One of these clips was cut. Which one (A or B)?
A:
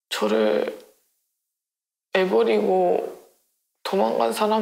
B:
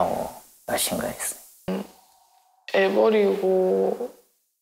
B